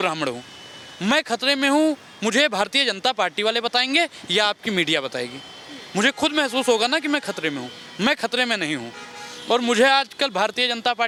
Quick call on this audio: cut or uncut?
uncut